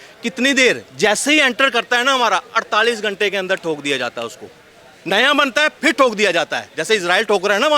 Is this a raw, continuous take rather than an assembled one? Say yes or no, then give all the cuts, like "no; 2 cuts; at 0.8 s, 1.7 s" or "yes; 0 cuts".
yes; 0 cuts